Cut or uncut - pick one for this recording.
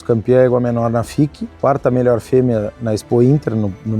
cut